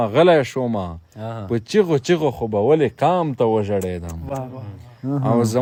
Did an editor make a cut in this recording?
no; 0 cuts

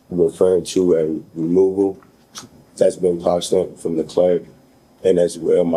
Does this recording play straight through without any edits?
yes; 0 cuts

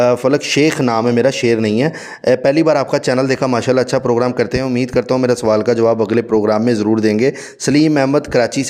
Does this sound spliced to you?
no; 0 cuts

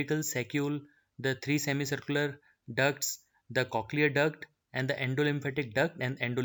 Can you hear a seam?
no; 0 cuts

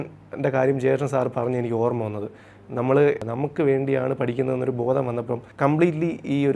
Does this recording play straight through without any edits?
no; 2 cuts; at 3.2 s, 5.4 s

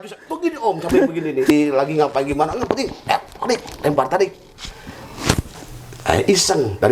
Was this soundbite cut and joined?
yes; 1 cut; at 1.5 s

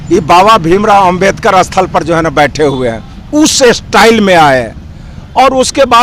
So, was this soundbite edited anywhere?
no; 0 cuts

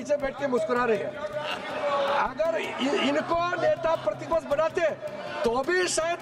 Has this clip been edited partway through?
no; 0 cuts

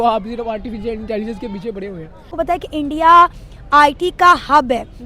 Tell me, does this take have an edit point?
yes; 1 cut; at 2.3 s

